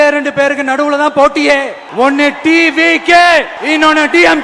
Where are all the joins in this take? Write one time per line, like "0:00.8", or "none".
0:01.8
0:03.5

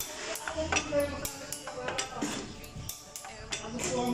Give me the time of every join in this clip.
none

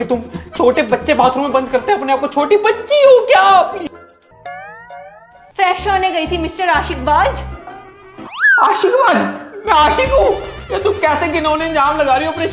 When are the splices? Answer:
none

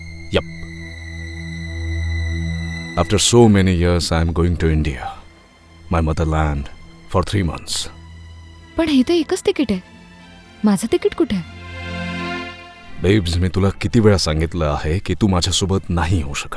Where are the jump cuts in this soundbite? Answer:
0:02.8

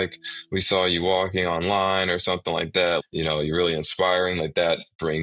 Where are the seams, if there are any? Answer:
0:03.0

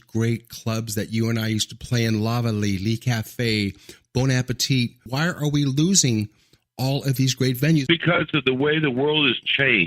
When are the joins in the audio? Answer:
0:05.0
0:07.8

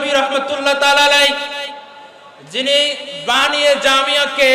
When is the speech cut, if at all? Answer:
none

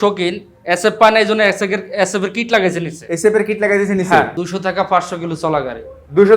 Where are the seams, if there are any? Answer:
0:04.4

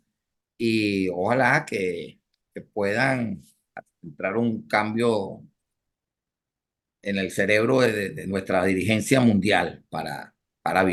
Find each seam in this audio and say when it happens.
none

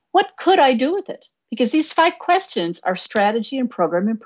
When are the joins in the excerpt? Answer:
none

